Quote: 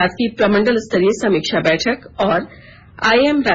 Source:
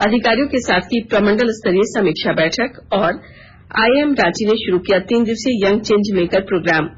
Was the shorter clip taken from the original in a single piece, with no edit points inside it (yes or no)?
yes